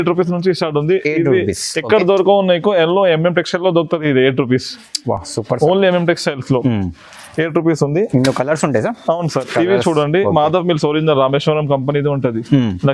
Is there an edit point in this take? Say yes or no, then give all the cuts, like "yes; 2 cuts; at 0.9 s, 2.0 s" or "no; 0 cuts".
no; 0 cuts